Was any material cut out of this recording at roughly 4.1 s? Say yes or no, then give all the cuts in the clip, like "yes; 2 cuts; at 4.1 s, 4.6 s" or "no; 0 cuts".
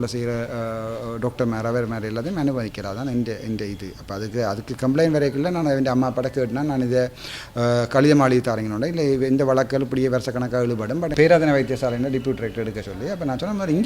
no; 1 cut; at 11.1 s